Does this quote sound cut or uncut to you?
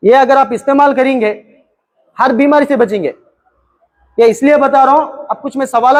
uncut